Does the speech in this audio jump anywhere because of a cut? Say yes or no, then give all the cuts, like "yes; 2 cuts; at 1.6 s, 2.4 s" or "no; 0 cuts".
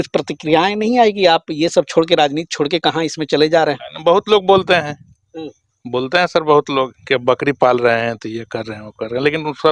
no; 0 cuts